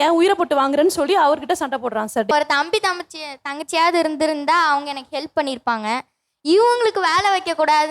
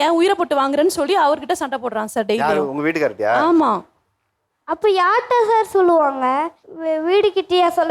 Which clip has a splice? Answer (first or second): first